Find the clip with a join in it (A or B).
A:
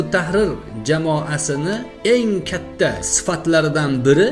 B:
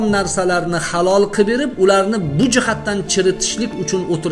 A